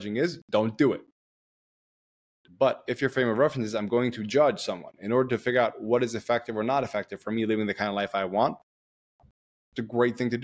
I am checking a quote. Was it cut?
no; 0 cuts

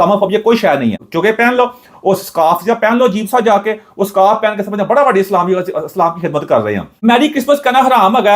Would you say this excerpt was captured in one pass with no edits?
no; 2 cuts; at 1.1 s, 6.9 s

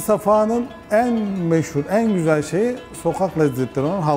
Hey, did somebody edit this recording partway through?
no; 0 cuts

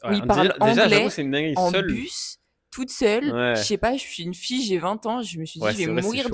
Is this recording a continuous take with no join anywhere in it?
yes; 0 cuts

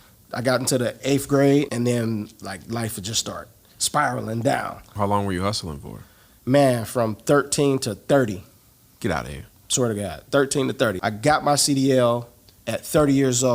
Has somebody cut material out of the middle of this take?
yes; 3 cuts; at 1.7 s, 4.9 s, 11.0 s

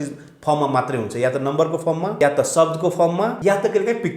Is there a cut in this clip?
yes; 2 cuts; at 2.1 s, 3.4 s

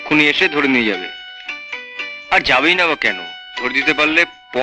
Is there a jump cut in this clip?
no; 0 cuts

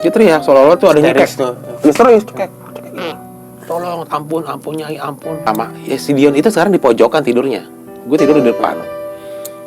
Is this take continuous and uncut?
no; 1 cut; at 5.4 s

